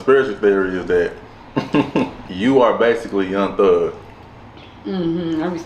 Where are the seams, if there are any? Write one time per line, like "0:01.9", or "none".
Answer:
0:02.2